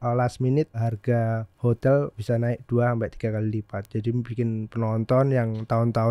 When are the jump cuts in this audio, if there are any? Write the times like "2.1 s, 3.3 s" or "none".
1.0 s, 2.2 s